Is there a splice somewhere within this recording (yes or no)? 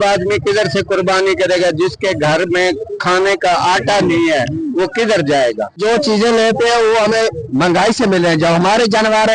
yes